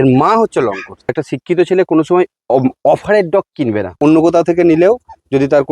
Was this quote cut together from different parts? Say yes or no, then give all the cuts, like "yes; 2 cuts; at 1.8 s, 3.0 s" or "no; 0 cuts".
yes; 2 cuts; at 1.1 s, 3.9 s